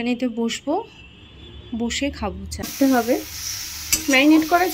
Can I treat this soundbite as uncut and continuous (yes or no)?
no